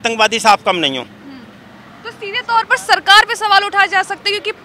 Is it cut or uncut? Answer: uncut